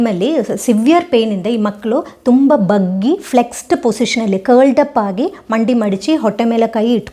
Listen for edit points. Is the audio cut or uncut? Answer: uncut